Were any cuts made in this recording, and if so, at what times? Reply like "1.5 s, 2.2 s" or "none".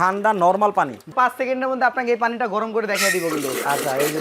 1.1 s